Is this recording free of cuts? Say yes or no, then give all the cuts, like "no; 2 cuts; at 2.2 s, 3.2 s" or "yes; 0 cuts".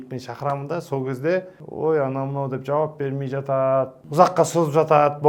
no; 2 cuts; at 1.6 s, 4.0 s